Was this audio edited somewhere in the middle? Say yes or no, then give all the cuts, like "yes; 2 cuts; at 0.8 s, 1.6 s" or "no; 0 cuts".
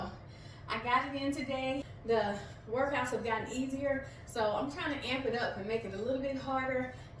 yes; 1 cut; at 1.9 s